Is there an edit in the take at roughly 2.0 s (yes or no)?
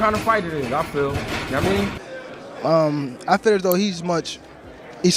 yes